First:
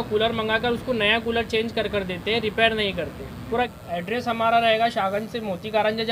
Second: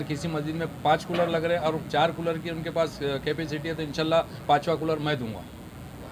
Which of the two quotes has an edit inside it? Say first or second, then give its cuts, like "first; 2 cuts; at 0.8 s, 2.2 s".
first; 1 cut; at 3.7 s